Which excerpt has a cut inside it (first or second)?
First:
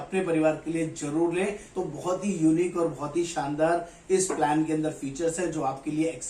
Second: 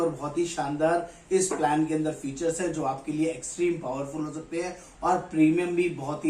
first